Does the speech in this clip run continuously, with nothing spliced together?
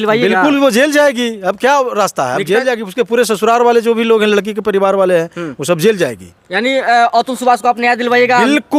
yes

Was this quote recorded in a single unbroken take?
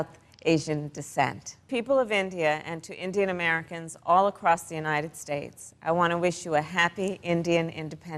no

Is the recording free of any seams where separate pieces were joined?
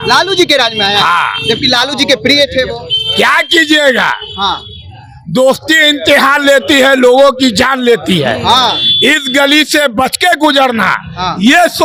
yes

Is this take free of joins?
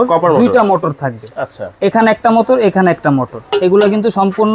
no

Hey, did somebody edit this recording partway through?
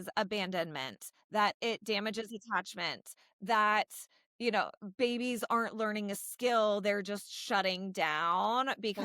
no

